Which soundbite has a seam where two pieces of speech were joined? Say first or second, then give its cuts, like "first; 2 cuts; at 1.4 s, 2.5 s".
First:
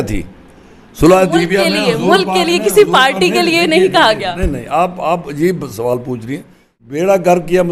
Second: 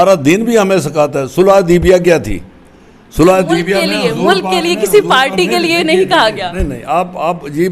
first; 1 cut; at 6.8 s